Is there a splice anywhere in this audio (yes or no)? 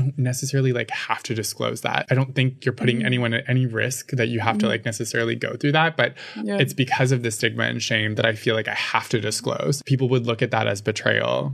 no